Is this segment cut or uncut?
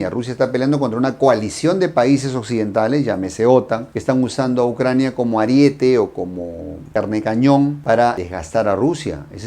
uncut